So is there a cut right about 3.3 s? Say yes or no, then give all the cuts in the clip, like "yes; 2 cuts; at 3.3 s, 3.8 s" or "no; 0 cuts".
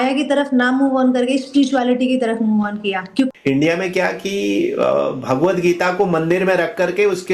yes; 1 cut; at 3.3 s